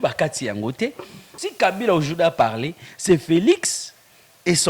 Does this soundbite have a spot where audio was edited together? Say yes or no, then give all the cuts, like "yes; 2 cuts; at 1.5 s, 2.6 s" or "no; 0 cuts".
yes; 1 cut; at 1.3 s